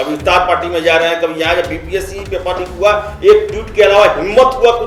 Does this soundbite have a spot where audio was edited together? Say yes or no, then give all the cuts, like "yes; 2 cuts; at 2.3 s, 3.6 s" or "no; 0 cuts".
no; 0 cuts